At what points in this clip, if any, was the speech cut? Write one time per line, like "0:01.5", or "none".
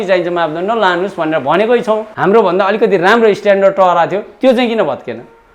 0:02.1